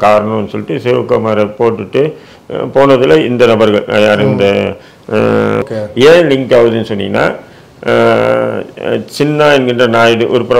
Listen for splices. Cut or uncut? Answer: cut